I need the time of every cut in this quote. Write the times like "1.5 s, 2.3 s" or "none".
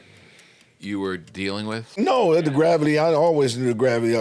1.8 s